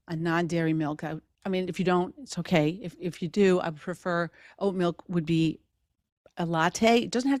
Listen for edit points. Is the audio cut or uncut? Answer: uncut